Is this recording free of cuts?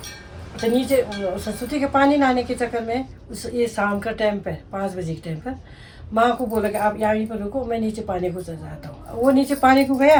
yes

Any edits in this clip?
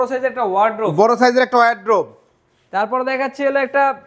no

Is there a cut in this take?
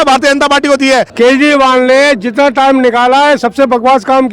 yes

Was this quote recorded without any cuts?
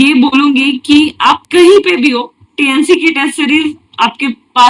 no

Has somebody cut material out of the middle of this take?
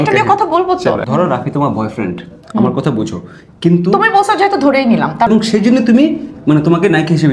yes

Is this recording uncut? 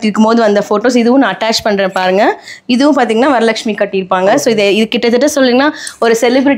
yes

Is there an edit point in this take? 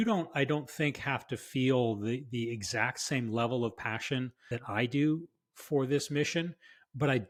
no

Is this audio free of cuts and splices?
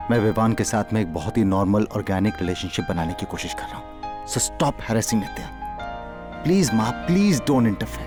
yes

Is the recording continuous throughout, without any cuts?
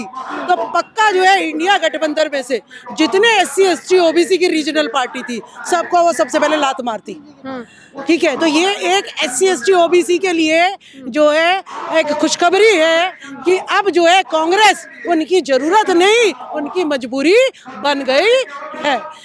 yes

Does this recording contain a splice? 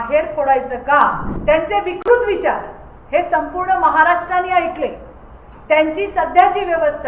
yes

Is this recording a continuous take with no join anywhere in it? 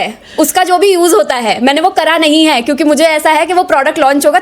yes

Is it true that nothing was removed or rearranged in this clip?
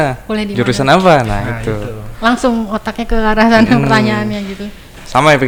yes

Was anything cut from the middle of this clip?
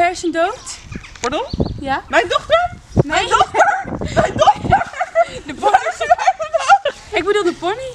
yes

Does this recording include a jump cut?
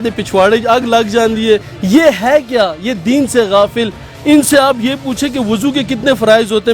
yes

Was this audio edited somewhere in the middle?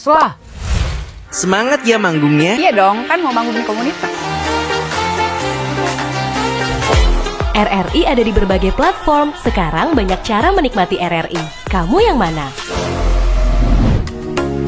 no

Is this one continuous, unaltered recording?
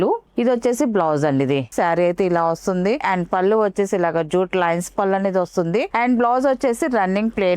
no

